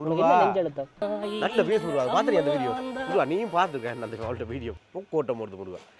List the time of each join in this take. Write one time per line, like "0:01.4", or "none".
0:01.0